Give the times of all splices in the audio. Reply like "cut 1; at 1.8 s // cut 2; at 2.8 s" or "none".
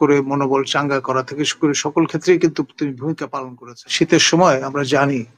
cut 1; at 3.3 s